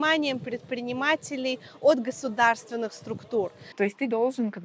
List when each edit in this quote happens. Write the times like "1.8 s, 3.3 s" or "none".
3.6 s